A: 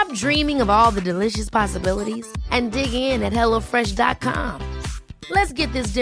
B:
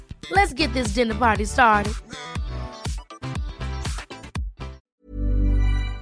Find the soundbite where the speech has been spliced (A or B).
B